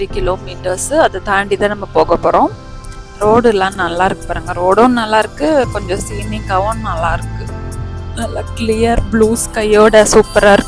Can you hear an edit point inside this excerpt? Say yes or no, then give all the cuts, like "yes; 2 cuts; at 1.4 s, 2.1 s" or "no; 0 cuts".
no; 0 cuts